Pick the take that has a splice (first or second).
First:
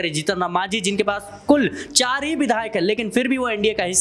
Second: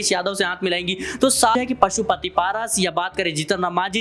second